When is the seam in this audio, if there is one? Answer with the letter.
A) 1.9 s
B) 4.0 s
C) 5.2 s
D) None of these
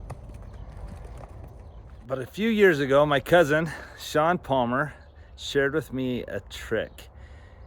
A